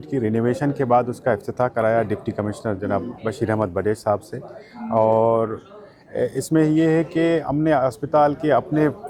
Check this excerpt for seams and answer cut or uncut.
uncut